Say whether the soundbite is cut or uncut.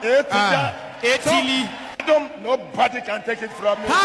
cut